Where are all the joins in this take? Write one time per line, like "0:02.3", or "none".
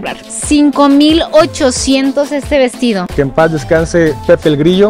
0:03.1